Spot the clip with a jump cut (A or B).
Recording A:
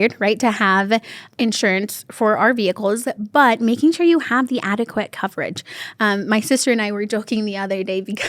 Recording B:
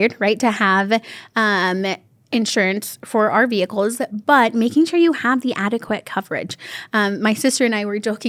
A